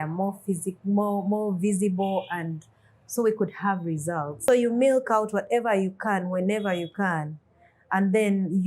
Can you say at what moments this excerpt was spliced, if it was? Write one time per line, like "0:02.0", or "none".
0:04.3